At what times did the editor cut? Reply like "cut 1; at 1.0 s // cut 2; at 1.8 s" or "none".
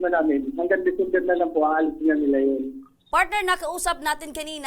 cut 1; at 3.0 s